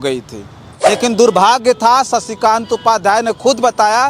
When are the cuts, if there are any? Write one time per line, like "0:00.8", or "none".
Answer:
0:01.0